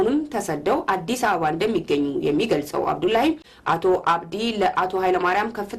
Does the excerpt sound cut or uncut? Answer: cut